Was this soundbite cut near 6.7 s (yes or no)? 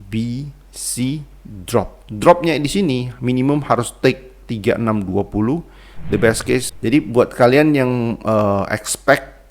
yes